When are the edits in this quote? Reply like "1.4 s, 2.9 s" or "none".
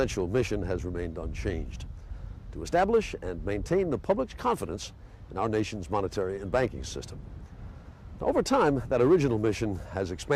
3.8 s